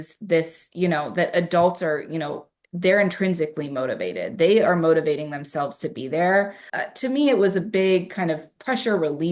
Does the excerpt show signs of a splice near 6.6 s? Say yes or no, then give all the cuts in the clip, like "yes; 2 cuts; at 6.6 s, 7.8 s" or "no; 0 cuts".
yes; 1 cut; at 6.6 s